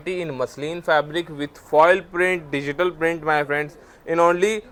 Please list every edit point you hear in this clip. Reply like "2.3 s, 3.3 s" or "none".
none